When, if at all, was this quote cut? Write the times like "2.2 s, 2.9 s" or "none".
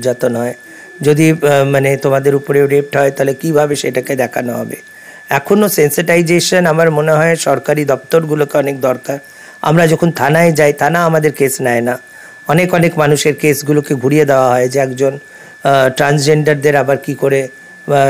none